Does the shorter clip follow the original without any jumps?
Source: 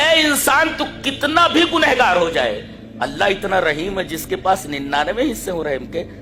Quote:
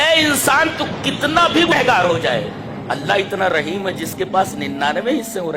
no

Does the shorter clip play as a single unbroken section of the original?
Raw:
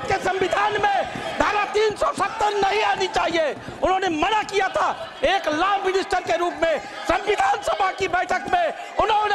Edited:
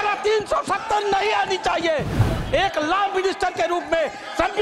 no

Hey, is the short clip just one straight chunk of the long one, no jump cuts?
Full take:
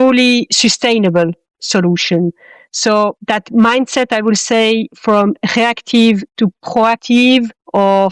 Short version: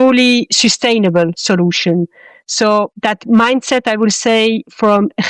no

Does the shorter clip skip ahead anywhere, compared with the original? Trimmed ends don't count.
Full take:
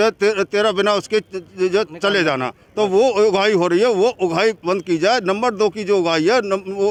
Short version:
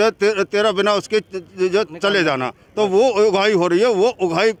no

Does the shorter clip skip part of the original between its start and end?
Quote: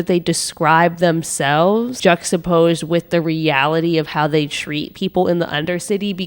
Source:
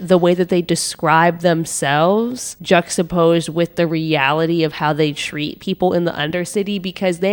yes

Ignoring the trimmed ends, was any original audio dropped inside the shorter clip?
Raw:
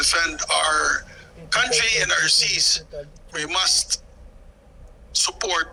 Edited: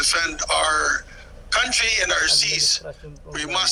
no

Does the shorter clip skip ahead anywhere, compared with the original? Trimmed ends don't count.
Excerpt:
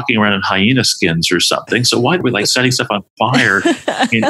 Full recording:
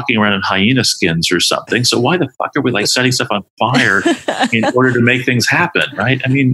yes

